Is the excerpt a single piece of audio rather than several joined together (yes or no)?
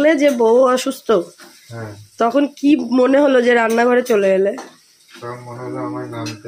yes